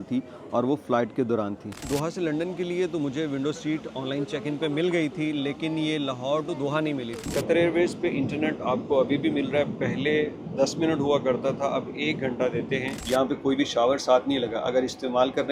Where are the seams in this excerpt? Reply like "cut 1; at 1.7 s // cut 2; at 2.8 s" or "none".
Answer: cut 1; at 1.8 s // cut 2; at 7.2 s // cut 3; at 13.0 s